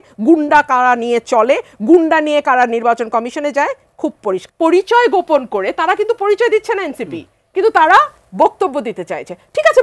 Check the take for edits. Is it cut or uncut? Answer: cut